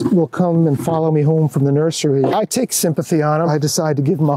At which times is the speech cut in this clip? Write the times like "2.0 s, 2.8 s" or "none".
2.3 s, 3.5 s